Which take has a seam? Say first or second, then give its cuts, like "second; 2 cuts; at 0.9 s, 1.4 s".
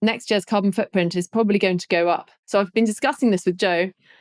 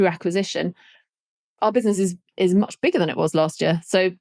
first; 1 cut; at 2.3 s